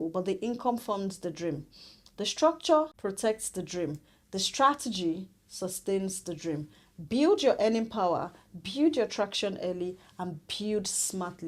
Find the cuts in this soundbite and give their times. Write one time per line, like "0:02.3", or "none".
0:02.9